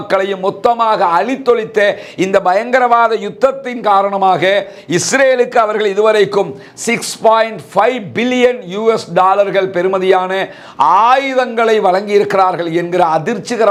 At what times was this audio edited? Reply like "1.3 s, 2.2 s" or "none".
none